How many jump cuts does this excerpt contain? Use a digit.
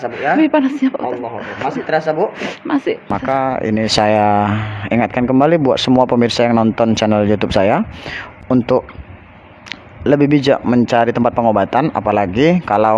1